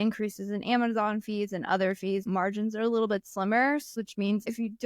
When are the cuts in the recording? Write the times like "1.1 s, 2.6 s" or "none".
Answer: 2.2 s, 4.0 s